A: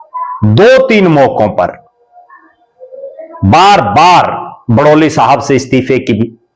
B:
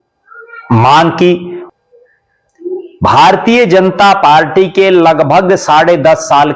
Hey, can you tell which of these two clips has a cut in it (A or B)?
B